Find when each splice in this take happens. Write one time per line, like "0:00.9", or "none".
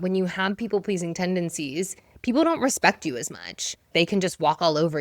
0:03.8